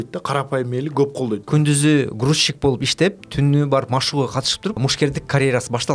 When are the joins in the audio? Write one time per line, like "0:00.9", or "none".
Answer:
0:01.4
0:04.8